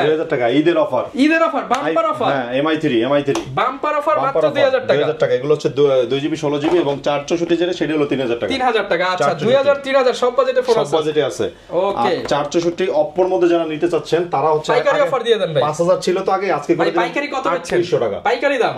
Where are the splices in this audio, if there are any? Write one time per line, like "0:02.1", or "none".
none